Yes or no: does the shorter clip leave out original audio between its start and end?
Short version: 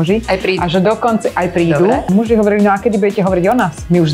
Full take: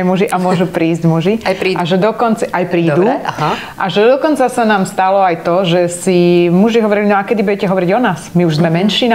yes